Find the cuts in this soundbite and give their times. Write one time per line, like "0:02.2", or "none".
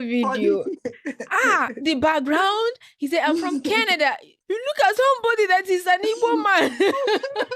0:04.3